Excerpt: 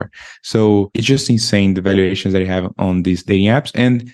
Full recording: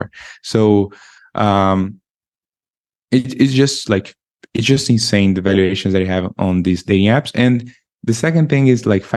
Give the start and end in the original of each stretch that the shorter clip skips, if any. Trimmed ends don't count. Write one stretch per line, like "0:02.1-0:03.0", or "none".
0:00.9-0:04.5